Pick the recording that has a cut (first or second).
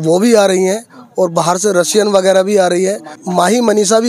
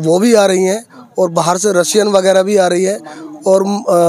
first